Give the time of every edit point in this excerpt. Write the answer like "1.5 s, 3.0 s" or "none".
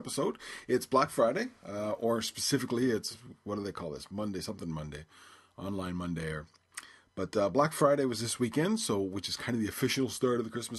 none